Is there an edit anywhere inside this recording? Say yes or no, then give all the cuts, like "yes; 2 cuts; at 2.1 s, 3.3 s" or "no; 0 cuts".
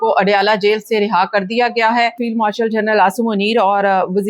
yes; 1 cut; at 2.2 s